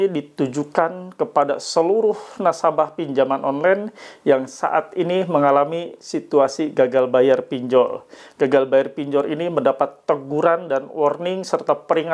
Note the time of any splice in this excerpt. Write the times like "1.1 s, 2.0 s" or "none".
none